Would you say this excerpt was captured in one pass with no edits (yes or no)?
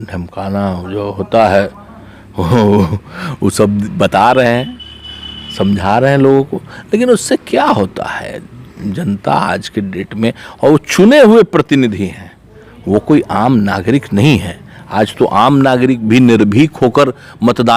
yes